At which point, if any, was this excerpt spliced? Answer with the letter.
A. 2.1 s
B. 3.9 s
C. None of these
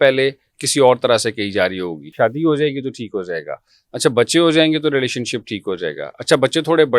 A